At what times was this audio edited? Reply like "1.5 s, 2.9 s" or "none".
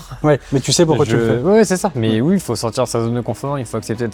none